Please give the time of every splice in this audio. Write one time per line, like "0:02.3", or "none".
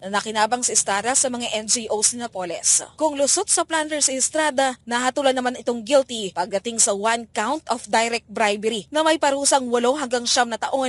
none